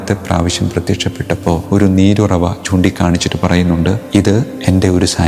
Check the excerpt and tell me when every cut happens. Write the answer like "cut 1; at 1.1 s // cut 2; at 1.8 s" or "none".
cut 1; at 1.6 s // cut 2; at 4.4 s